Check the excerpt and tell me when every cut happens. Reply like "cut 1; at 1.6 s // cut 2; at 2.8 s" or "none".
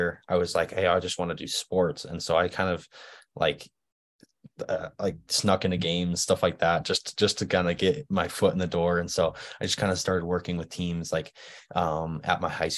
none